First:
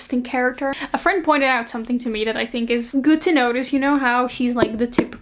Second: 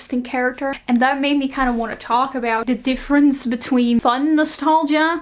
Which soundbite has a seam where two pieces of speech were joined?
second; 3 cuts; at 0.8 s, 2.6 s, 4.0 s

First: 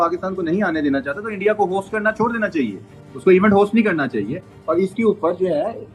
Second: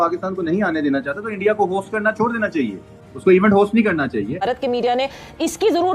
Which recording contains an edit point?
second; 1 cut; at 4.4 s

